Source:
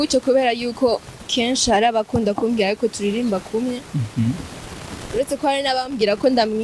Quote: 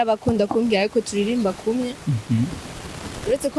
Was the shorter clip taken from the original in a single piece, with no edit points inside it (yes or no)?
yes